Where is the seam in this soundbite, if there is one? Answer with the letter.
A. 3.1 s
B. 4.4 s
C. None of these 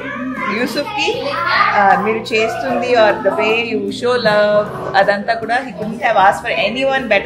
C